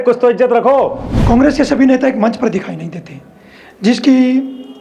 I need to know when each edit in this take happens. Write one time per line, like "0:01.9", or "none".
0:01.1